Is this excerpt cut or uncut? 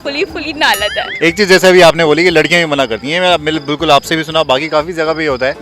uncut